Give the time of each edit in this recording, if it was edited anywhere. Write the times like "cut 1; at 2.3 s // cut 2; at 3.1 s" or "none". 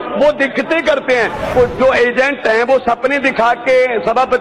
cut 1; at 1.5 s